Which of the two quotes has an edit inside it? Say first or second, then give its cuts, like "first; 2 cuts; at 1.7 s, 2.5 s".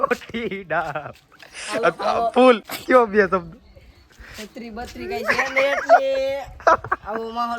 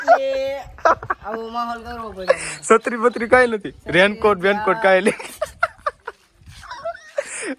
first; 1 cut; at 2.7 s